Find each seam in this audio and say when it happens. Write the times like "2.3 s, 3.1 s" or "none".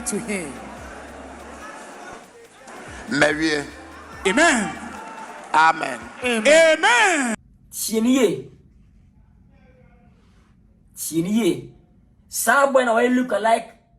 7.4 s